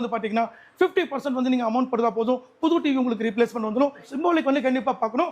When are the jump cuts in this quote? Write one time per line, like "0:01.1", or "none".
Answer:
0:04.0